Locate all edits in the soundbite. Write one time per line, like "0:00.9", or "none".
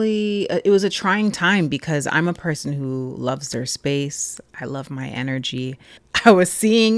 0:06.0